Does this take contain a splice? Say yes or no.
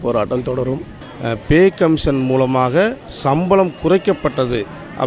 yes